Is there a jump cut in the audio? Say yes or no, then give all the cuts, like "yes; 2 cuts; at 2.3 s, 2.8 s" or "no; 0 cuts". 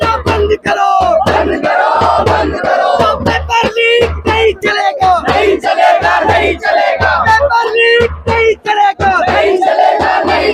no; 0 cuts